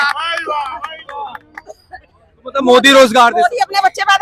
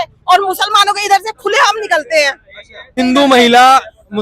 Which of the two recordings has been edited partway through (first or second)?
second